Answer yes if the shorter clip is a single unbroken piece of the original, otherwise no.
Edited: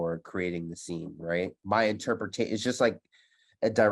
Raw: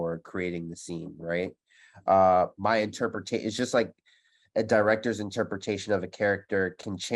no